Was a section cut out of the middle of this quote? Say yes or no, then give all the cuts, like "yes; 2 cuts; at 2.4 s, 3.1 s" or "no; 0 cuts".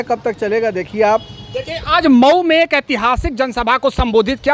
no; 0 cuts